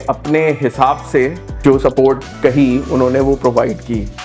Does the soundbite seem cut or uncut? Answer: cut